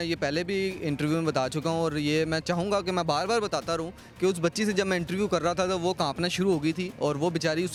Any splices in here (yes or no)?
no